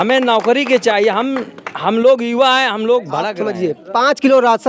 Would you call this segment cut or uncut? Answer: cut